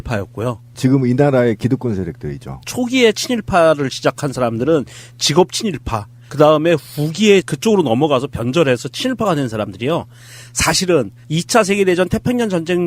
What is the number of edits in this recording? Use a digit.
1